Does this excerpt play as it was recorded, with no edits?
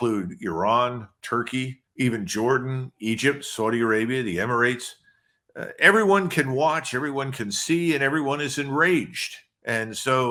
yes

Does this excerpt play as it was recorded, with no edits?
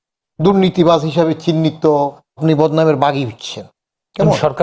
no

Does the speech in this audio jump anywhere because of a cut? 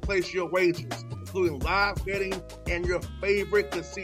no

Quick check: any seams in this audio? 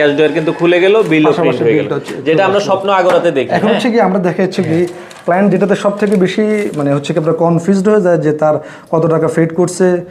no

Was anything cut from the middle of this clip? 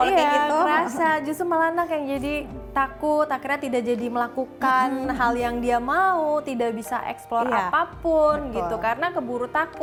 no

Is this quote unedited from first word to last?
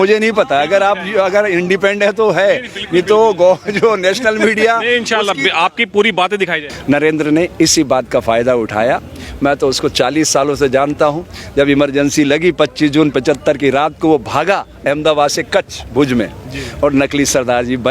no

